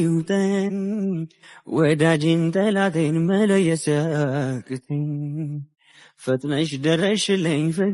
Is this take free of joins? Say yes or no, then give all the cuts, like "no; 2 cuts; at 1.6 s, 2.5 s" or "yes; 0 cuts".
yes; 0 cuts